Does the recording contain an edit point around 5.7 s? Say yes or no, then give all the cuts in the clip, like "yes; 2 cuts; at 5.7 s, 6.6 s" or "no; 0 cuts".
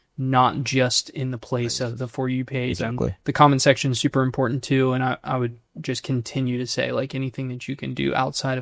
yes; 1 cut; at 5.7 s